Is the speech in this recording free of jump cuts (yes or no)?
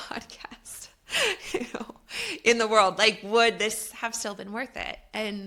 yes